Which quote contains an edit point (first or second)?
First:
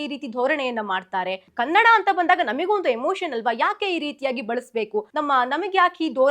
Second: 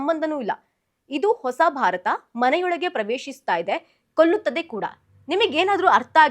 first